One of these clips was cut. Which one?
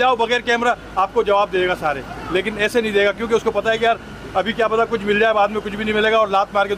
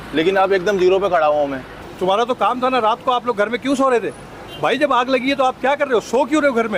second; 1 cut; at 1.8 s

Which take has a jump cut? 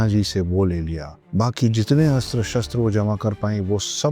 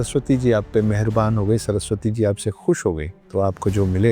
second; 1 cut; at 3.1 s

